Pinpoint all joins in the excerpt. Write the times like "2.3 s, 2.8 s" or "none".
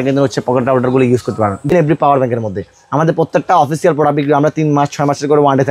1.7 s